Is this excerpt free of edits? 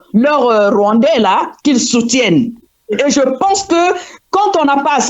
yes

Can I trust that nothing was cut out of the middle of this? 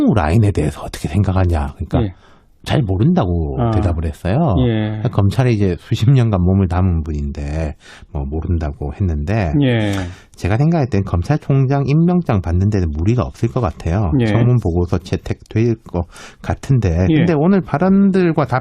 no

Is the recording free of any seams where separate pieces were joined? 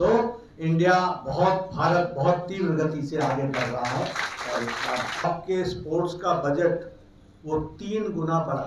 no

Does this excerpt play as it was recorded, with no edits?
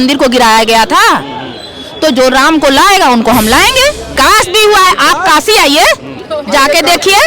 no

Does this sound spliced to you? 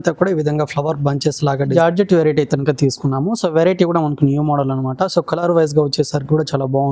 yes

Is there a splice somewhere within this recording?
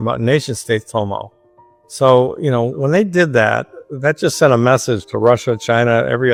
no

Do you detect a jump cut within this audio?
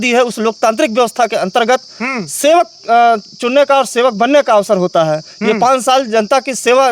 no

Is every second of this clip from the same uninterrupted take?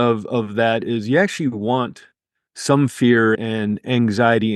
no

